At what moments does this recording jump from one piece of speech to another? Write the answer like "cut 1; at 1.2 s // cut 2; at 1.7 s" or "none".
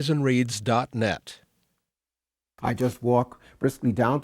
cut 1; at 2.0 s